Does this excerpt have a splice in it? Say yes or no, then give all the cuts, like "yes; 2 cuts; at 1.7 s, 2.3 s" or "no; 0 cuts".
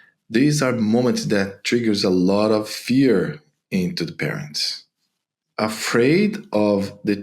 yes; 1 cut; at 5.4 s